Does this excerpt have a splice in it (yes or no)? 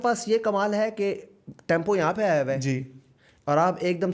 no